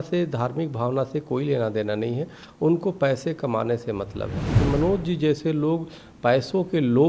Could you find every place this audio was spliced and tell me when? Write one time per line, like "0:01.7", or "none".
0:04.5